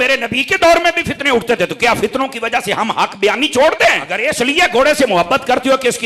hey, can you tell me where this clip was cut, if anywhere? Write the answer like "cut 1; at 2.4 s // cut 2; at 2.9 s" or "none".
cut 1; at 4.1 s

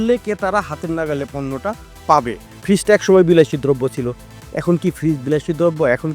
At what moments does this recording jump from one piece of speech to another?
cut 1; at 2.5 s

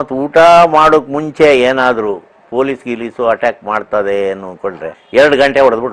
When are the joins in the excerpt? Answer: cut 1; at 4.9 s

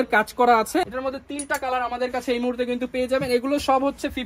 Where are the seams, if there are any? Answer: cut 1; at 1.0 s

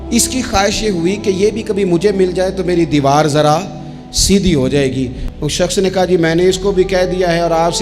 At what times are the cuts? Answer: cut 1; at 5.2 s

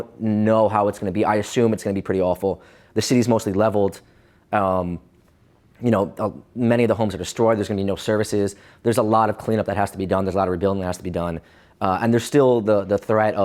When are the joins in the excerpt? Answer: none

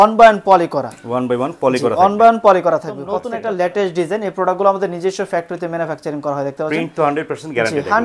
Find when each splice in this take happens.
cut 1; at 3.1 s

